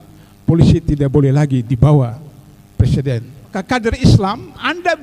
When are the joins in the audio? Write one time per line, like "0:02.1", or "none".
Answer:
0:03.5